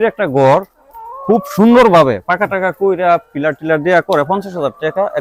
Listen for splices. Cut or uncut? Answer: uncut